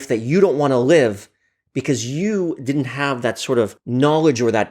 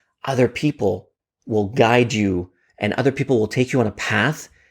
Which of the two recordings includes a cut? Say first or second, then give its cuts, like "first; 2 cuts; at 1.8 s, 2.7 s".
first; 1 cut; at 3.8 s